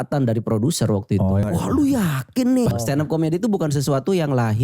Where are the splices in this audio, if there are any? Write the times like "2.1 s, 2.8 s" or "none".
1.4 s, 2.7 s